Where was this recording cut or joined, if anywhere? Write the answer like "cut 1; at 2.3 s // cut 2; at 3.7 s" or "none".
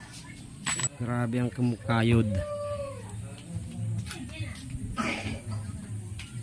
cut 1; at 0.9 s